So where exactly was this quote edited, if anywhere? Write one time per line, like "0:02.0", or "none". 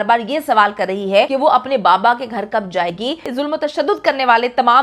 0:01.3
0:03.3

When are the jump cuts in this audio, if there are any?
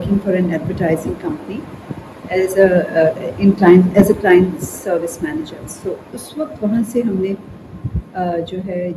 none

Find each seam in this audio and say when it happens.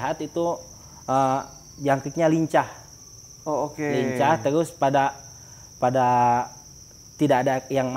none

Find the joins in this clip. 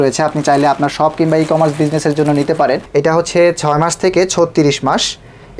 0:02.8

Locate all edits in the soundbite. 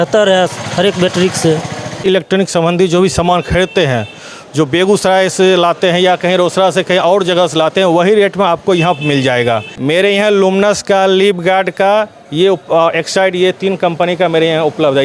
0:02.0
0:09.7

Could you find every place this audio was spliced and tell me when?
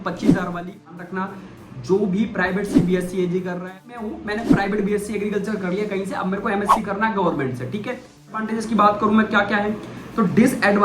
0:01.0
0:04.1
0:08.5

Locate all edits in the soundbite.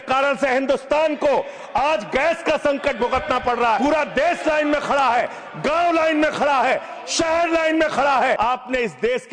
0:03.8
0:08.4

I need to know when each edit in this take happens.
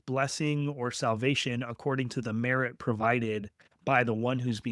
none

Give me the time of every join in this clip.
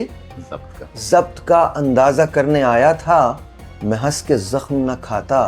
none

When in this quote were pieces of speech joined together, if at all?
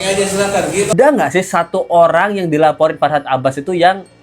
0:00.9

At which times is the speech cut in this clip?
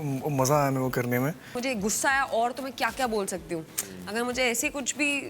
0:01.5

